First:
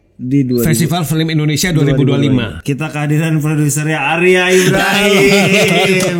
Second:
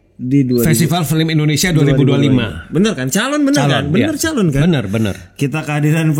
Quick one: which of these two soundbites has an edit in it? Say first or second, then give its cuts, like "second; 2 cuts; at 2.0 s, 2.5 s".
first; 1 cut; at 2.6 s